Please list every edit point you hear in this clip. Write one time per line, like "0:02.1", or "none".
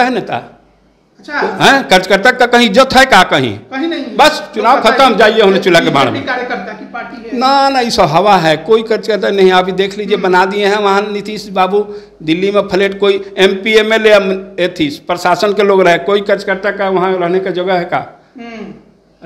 none

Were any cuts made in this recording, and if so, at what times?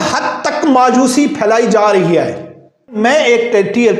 0:03.0

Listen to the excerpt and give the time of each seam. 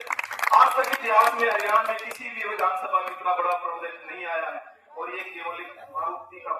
none

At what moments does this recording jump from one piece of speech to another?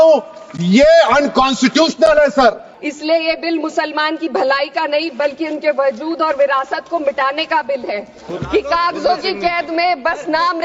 0:02.7
0:08.3

